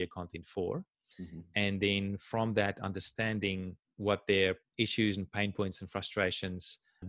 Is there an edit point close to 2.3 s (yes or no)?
no